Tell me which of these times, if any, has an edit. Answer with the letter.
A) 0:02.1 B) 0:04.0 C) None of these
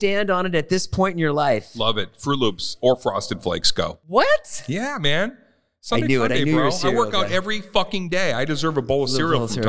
B